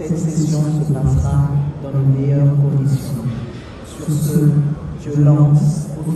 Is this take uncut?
yes; 0 cuts

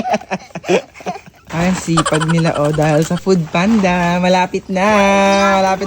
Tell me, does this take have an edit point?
yes; 1 cut; at 1.4 s

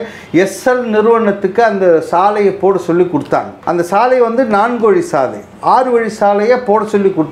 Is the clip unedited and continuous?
no; 1 cut; at 3.6 s

